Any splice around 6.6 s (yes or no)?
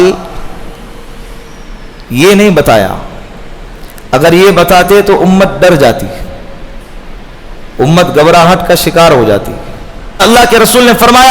no